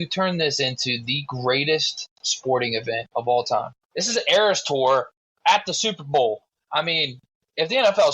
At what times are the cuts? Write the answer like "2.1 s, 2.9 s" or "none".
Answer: 3.0 s, 3.8 s